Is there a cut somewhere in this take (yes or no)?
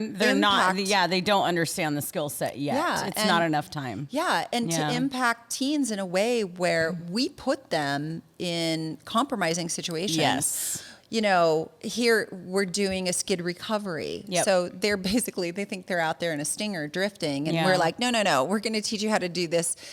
no